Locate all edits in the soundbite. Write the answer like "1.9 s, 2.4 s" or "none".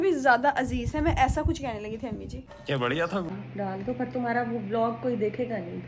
3.3 s